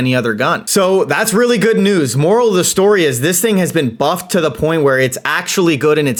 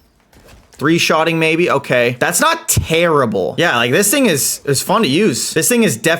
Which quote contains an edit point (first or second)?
second